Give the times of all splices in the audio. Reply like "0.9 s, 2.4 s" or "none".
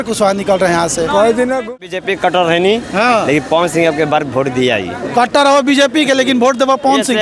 1.7 s